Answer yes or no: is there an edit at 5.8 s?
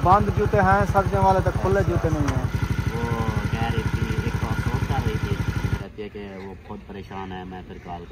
yes